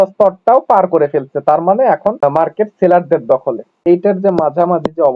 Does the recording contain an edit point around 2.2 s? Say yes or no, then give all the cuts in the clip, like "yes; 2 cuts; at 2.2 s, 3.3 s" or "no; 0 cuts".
yes; 2 cuts; at 2.2 s, 3.8 s